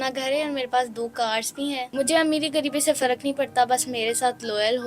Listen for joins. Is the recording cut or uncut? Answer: cut